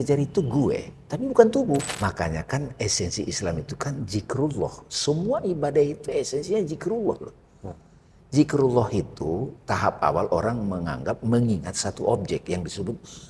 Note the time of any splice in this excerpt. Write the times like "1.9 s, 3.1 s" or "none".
1.9 s